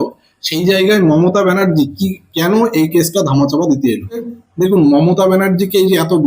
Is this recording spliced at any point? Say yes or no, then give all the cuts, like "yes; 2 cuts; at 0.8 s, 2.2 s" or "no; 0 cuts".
yes; 1 cut; at 4.4 s